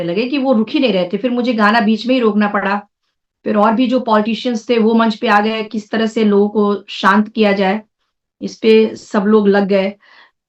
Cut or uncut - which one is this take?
uncut